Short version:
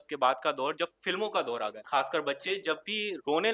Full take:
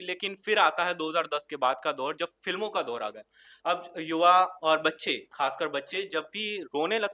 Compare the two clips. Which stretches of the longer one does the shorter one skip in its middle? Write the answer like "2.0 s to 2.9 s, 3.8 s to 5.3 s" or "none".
3.2 s to 5.3 s